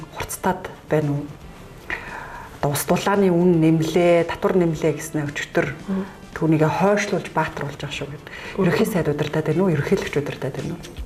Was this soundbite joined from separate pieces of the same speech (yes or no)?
no